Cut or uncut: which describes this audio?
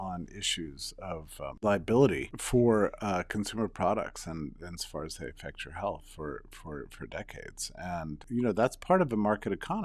cut